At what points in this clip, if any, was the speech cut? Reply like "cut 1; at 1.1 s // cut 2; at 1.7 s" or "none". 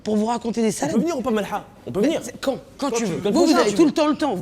cut 1; at 1.0 s